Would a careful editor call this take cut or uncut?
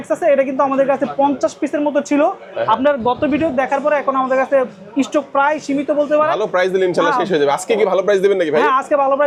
uncut